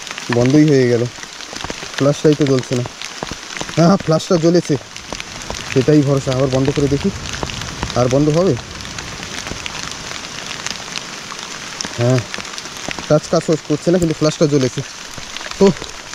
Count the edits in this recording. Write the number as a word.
zero